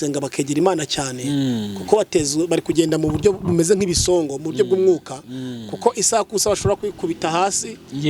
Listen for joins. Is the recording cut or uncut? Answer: uncut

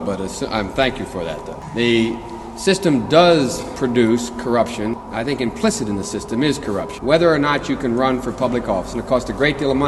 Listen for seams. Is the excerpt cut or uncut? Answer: cut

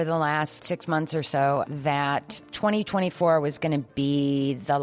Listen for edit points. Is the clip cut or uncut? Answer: uncut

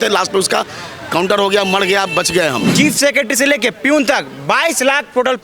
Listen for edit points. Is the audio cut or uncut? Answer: cut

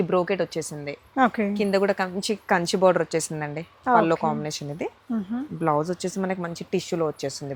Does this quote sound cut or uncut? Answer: uncut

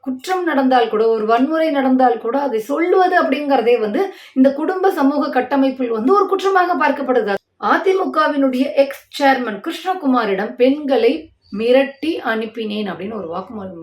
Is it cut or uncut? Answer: cut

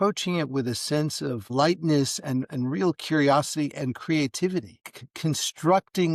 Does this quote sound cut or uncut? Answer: cut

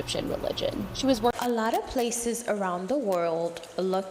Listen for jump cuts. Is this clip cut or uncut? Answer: cut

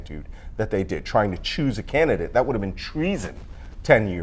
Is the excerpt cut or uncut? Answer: uncut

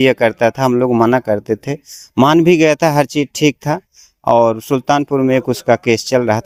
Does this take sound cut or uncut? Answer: uncut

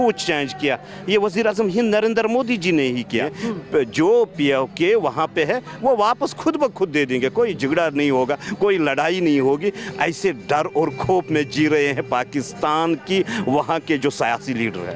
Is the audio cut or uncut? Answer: cut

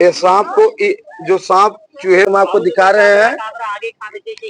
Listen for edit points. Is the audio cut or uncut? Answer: cut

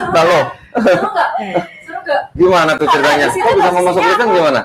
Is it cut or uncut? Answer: uncut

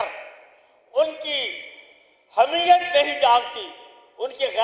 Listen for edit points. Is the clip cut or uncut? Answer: uncut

